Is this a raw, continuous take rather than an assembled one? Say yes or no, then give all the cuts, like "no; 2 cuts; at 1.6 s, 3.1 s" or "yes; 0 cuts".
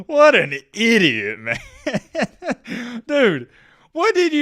yes; 0 cuts